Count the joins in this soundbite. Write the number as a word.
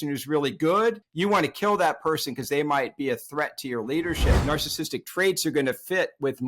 two